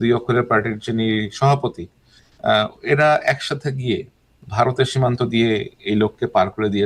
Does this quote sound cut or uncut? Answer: uncut